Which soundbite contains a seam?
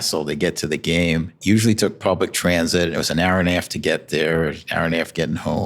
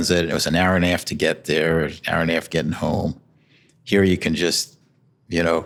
first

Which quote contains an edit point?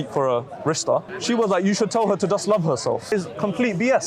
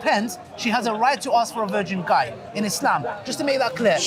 first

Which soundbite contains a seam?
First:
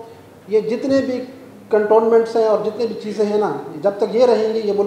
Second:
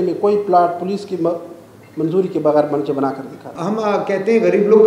second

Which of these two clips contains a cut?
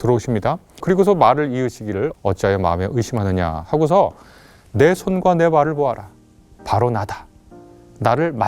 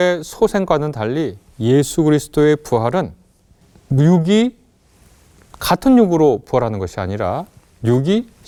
first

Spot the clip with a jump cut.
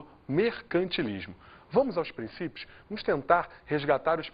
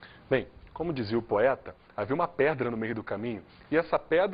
second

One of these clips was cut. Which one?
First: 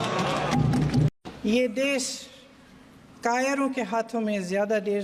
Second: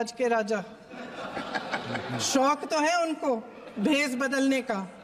first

